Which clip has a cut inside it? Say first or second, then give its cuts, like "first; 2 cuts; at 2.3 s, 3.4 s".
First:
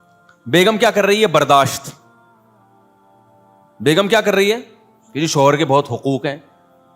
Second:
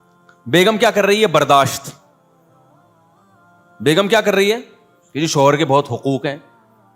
first; 2 cuts; at 2.2 s, 3.7 s